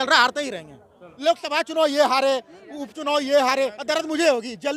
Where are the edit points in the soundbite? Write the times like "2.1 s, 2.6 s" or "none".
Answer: 1.1 s